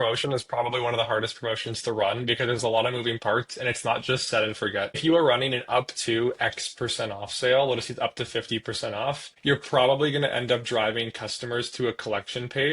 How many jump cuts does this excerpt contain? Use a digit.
2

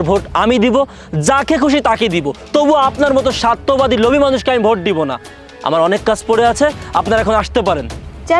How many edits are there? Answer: 0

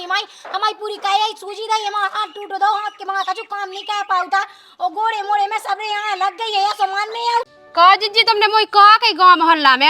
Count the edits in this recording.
1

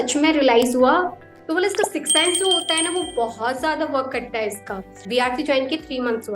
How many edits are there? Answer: 2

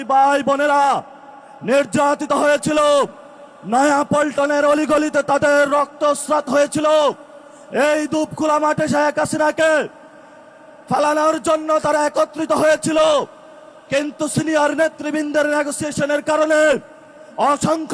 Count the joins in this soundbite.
0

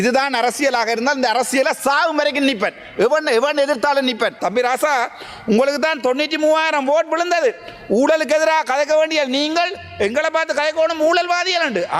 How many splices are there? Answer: 1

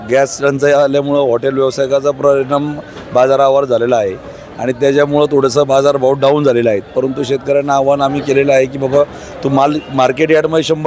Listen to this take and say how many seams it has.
0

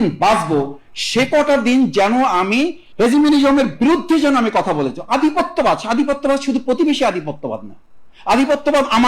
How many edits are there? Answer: 1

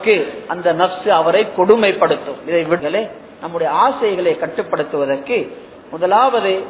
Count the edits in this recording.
1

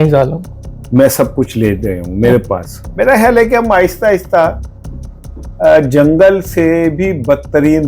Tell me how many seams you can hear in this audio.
1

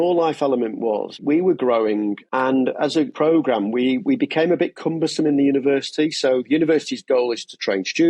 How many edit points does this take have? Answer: 3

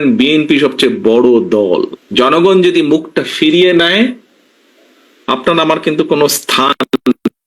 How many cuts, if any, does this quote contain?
1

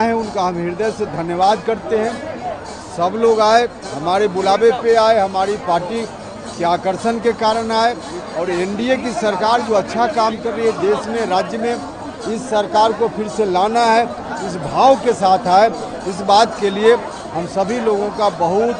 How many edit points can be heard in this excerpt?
0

